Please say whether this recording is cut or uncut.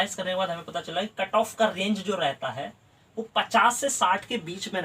uncut